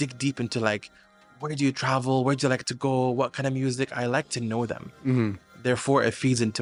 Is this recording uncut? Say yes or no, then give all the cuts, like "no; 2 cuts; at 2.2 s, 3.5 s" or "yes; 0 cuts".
yes; 0 cuts